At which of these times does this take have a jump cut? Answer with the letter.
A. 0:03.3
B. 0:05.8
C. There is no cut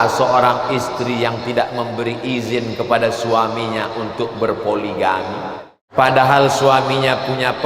B